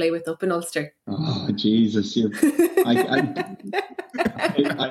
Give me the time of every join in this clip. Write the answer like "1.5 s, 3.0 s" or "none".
1.0 s